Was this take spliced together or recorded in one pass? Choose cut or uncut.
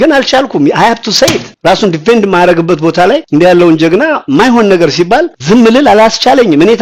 uncut